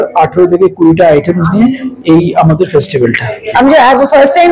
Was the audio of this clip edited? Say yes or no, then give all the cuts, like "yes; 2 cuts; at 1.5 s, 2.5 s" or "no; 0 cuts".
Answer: yes; 1 cut; at 3.2 s